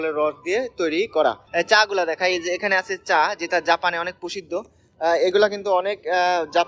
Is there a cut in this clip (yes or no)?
yes